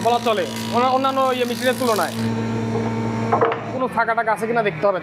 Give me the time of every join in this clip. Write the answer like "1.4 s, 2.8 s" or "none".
2.2 s, 3.7 s